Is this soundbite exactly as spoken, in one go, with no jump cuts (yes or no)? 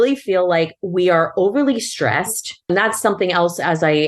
no